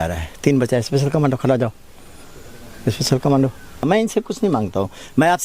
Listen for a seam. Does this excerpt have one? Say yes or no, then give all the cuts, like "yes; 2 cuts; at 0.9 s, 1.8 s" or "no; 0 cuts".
yes; 1 cut; at 3.8 s